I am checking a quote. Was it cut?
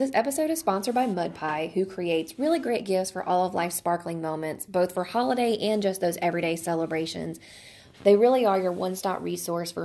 no; 0 cuts

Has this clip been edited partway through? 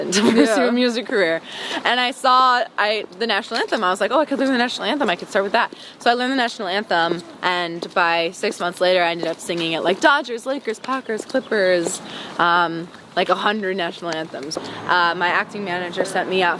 yes; 1 cut; at 14.5 s

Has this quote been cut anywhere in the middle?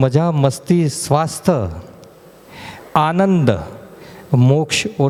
no; 0 cuts

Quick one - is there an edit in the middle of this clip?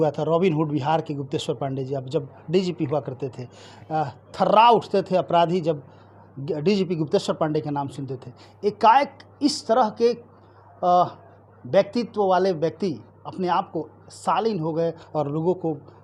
no; 0 cuts

